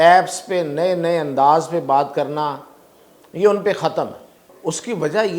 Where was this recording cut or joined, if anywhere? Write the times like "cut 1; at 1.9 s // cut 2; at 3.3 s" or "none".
cut 1; at 4.5 s